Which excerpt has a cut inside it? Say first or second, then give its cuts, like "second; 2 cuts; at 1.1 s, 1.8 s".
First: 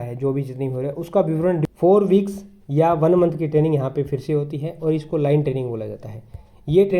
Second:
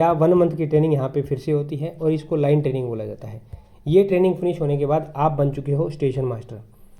first; 1 cut; at 1.6 s